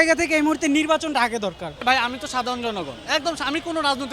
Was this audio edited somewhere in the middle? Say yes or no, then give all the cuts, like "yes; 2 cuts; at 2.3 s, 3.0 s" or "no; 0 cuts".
yes; 1 cut; at 1.8 s